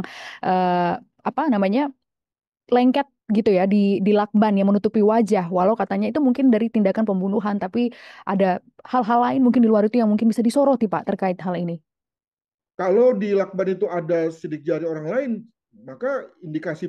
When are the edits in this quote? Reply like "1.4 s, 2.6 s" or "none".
none